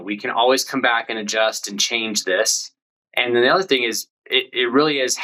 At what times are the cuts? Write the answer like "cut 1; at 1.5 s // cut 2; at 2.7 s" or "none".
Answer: none